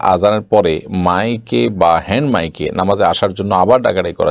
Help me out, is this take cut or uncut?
uncut